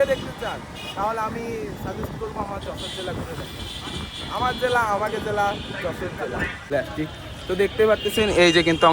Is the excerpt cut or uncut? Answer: cut